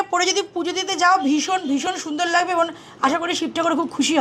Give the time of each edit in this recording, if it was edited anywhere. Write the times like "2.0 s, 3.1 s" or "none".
none